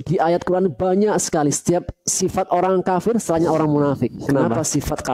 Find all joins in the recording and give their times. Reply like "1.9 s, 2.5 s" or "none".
4.2 s